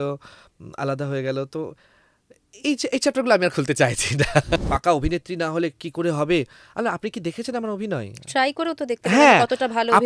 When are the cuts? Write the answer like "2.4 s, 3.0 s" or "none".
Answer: 4.6 s

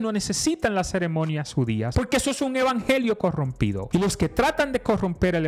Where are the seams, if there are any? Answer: 1.9 s, 3.8 s

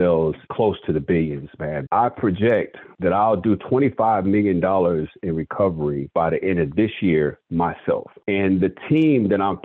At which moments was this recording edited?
1.8 s

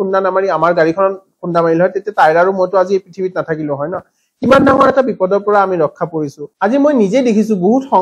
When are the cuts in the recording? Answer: 6.5 s

